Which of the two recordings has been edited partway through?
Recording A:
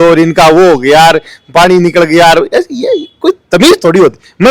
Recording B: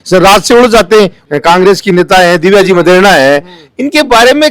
B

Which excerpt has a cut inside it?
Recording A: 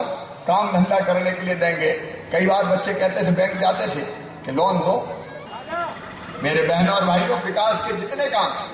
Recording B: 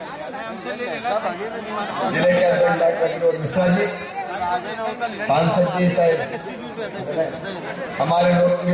A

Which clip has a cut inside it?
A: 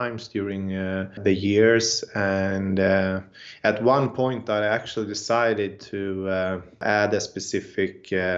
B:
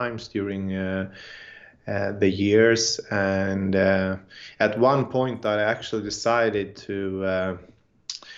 A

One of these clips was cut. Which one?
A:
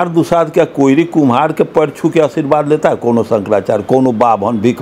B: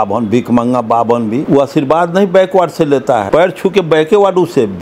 B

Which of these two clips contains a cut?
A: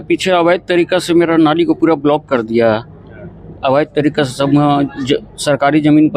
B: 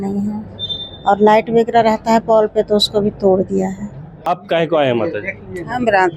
B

